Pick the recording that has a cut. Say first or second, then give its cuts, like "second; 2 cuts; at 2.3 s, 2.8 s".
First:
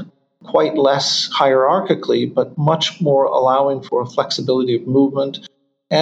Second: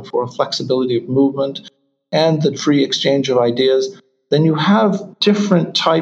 second; 1 cut; at 5.1 s